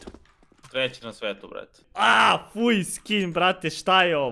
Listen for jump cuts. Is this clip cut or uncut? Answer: cut